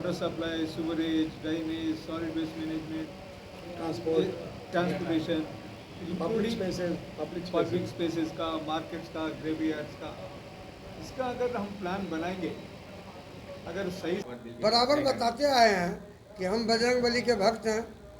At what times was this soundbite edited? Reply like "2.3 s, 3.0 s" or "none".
14.2 s